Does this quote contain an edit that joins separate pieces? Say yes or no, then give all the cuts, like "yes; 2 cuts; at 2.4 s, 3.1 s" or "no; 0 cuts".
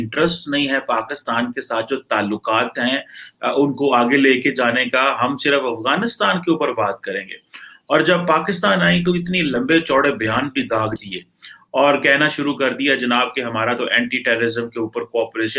no; 0 cuts